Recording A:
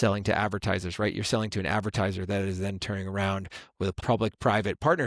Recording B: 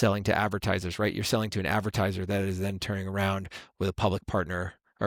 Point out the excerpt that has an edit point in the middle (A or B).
A